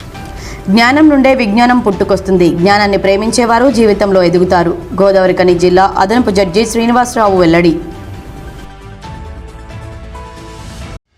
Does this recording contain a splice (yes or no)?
no